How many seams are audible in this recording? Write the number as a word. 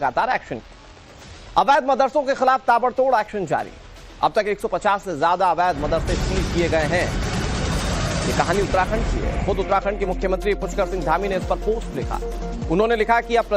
one